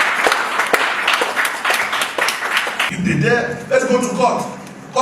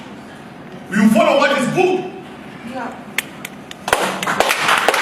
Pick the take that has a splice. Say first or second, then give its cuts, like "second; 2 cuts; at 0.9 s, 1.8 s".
first; 1 cut; at 2.9 s